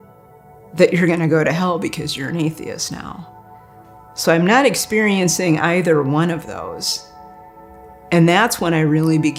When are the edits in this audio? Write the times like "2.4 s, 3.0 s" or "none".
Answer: none